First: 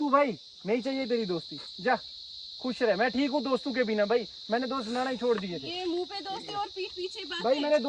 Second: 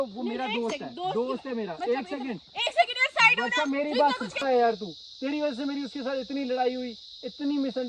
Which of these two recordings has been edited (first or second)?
second